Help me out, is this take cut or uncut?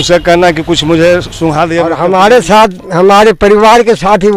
cut